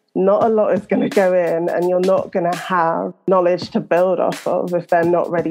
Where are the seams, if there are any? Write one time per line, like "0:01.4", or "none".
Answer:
0:03.3

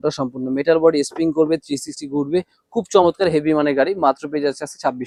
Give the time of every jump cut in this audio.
none

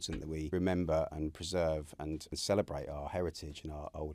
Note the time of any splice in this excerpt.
none

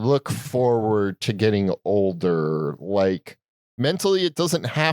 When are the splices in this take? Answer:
0:03.6

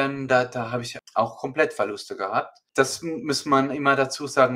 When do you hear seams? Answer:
0:00.9
0:02.6

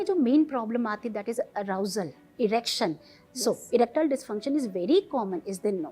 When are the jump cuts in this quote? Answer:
none

